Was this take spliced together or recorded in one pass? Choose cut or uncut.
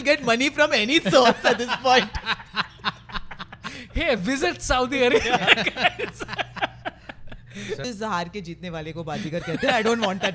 cut